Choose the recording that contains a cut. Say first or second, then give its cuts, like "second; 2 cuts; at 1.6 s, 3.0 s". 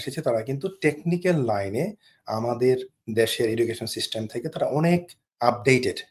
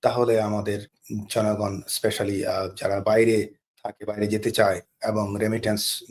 second; 2 cuts; at 1.0 s, 4.9 s